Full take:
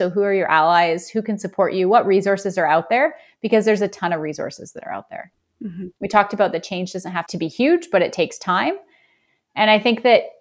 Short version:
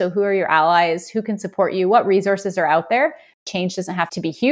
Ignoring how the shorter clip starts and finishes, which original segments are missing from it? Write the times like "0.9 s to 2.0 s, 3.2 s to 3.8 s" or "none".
3.4 s to 6.6 s